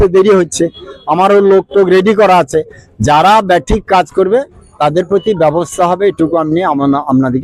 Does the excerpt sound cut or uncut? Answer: uncut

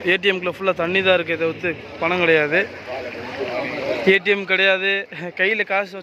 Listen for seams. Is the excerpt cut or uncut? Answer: uncut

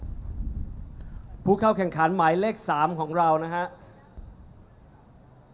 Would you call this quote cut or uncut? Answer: uncut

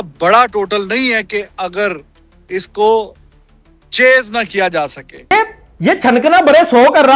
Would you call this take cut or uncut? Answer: cut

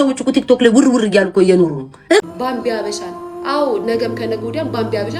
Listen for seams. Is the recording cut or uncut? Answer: cut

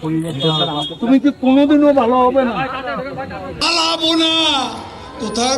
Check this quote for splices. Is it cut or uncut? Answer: cut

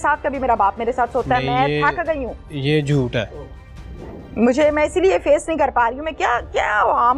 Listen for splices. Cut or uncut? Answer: uncut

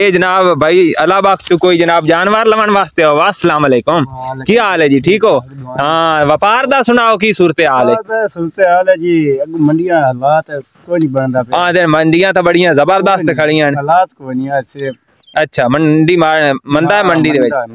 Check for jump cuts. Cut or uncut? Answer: uncut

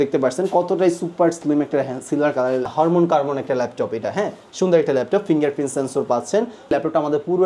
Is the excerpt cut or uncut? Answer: cut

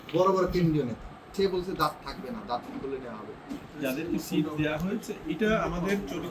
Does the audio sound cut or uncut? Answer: cut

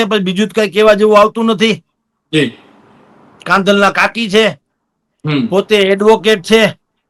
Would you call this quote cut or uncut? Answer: uncut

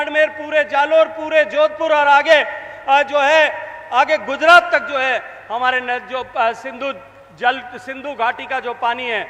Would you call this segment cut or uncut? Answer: uncut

